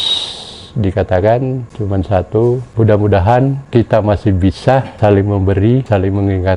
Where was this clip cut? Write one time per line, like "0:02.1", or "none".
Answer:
0:01.7
0:02.7
0:03.6
0:04.9
0:05.8